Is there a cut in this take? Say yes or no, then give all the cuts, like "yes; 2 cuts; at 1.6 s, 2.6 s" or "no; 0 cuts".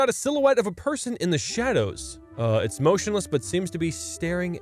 no; 0 cuts